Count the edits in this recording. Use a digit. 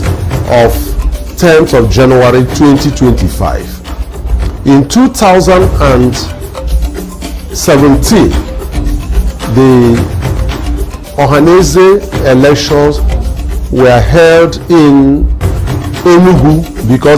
0